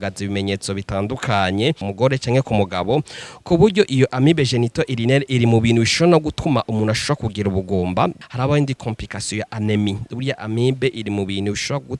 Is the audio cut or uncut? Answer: cut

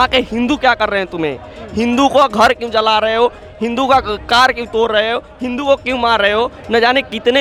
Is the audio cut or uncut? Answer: uncut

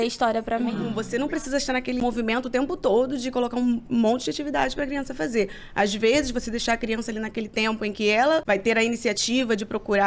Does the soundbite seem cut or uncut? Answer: cut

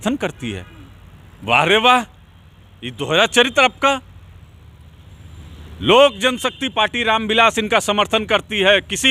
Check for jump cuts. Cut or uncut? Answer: uncut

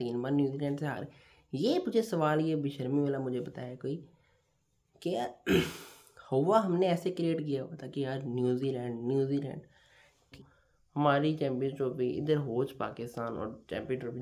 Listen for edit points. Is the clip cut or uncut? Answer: cut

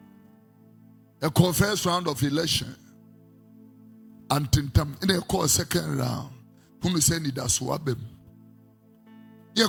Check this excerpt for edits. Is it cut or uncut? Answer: uncut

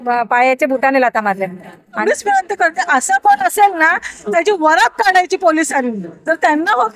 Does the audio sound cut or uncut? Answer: cut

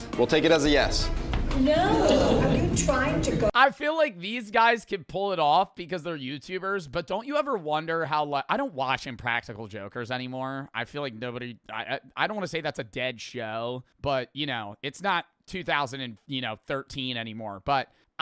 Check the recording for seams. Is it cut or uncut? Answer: uncut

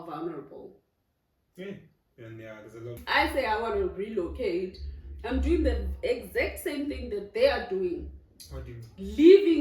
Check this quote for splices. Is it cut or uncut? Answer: cut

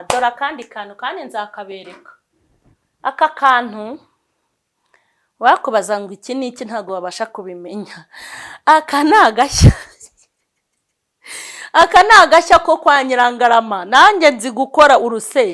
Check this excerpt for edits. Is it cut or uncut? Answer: uncut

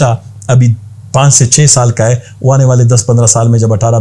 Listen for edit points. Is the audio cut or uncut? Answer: uncut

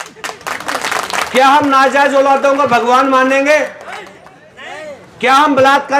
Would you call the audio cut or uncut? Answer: uncut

